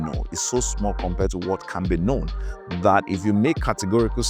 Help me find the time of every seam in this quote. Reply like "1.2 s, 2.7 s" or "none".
none

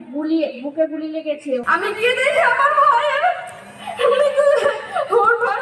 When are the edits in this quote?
1.6 s

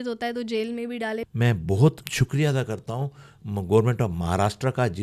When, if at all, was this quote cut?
1.3 s, 2.0 s

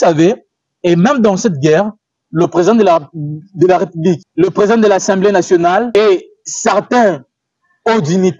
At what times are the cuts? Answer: 4.3 s, 5.9 s

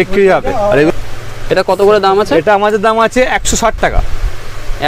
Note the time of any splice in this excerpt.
0.9 s

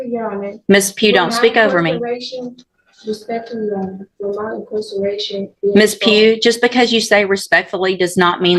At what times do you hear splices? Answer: none

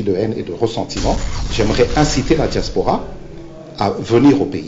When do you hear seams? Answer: 1.4 s

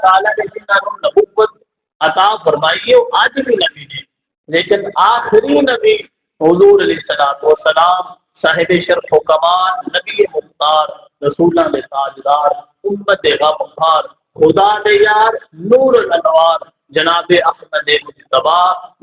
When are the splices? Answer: none

